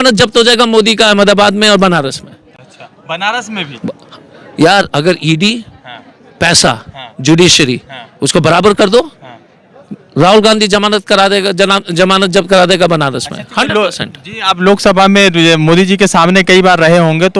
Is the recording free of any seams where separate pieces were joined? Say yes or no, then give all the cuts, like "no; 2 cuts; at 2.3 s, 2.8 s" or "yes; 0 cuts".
yes; 0 cuts